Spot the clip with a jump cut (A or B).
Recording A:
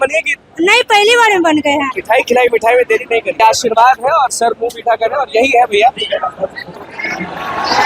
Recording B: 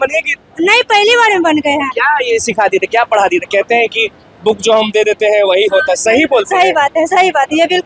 A